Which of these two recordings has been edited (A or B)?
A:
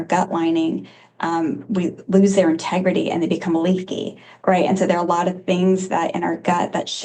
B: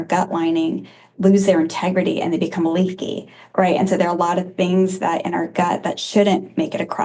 B